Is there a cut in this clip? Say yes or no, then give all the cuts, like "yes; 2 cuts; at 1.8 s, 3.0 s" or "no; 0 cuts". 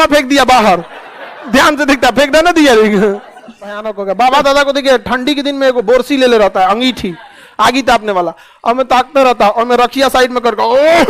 yes; 1 cut; at 3.9 s